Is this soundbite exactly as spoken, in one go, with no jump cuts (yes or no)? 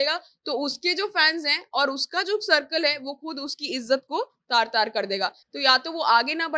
yes